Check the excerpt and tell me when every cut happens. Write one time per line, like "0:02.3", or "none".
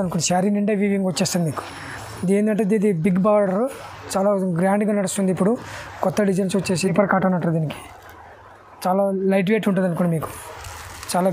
0:06.9

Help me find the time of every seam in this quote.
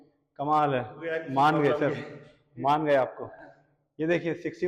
none

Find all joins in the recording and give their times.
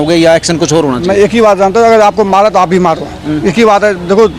none

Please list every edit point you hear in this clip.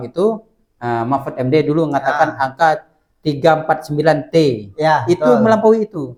none

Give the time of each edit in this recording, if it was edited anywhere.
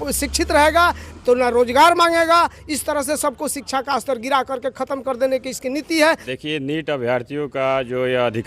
0:06.3

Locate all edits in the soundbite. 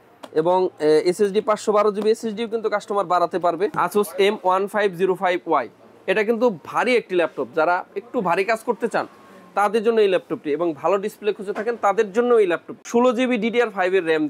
0:03.7
0:12.7

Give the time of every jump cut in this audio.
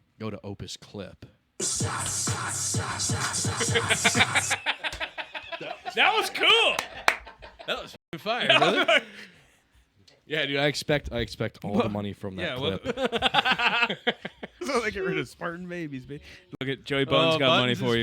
0:14.6

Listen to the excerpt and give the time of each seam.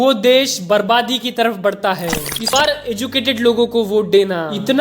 0:02.5

